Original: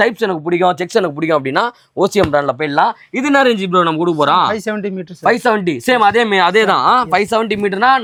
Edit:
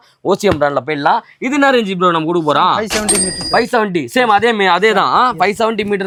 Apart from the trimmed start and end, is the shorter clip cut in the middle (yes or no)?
no